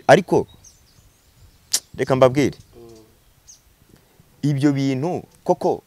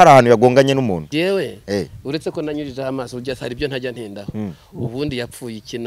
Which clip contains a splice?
second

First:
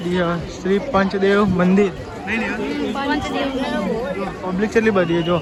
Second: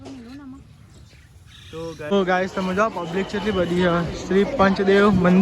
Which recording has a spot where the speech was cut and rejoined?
second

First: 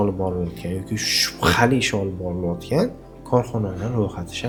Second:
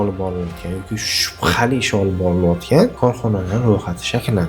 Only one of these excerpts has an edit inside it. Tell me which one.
second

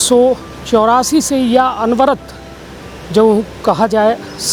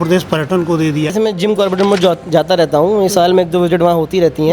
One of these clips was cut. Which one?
second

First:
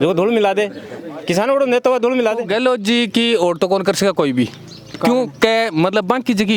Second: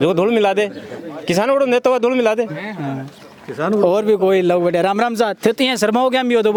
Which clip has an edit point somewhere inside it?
first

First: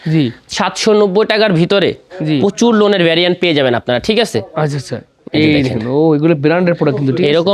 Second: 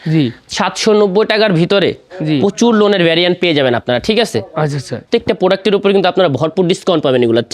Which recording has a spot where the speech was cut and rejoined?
second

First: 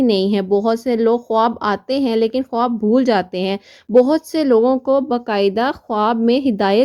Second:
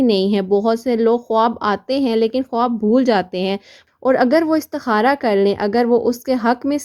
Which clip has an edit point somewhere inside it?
second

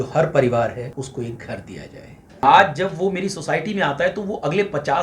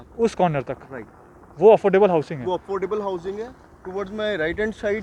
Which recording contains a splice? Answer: first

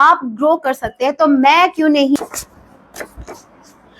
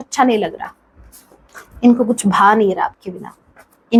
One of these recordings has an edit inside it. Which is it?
first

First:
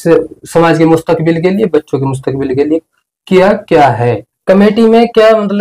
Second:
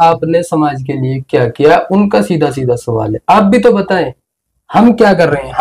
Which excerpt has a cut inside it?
first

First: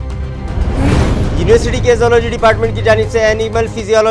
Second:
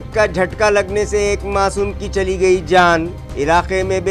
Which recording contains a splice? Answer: first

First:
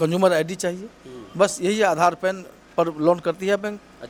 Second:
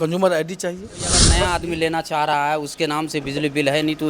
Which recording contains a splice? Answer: second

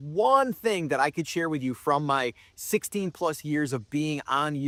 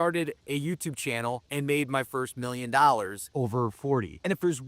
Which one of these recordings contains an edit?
second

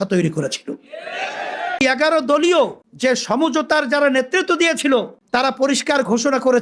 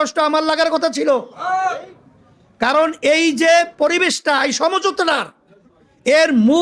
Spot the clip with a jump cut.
first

